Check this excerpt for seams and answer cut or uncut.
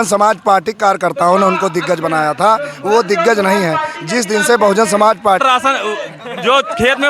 cut